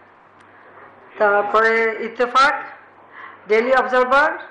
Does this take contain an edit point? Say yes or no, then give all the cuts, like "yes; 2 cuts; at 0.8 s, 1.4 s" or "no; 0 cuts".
no; 0 cuts